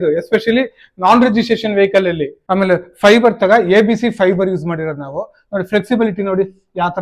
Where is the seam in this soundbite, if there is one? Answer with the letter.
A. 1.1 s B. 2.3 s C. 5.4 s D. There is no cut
B